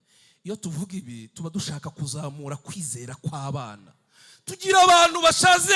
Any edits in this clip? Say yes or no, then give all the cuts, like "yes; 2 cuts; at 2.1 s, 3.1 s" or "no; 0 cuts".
no; 0 cuts